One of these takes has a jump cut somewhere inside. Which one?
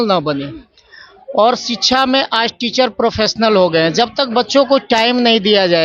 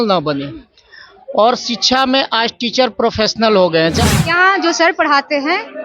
second; 1 cut; at 4.0 s

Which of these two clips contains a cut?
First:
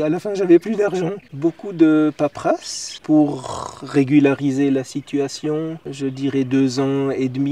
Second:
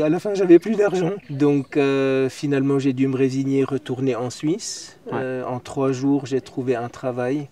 first; 1 cut; at 1.2 s

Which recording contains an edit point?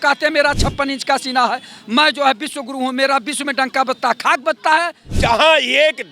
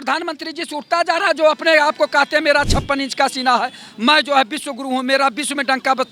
first; 1 cut; at 5.0 s

